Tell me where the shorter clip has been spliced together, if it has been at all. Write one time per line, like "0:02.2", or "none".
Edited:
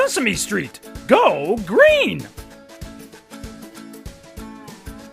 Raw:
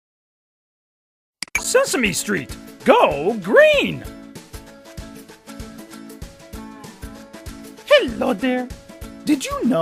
0:02.3